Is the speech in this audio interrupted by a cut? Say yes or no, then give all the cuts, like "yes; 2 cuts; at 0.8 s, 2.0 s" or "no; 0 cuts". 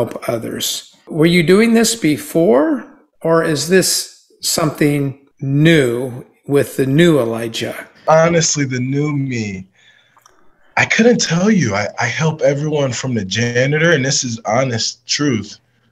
yes; 3 cuts; at 1.1 s, 5.3 s, 8.0 s